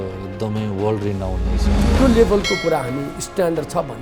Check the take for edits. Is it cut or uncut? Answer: cut